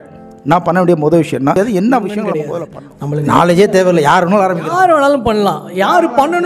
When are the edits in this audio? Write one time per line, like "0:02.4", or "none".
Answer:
0:02.4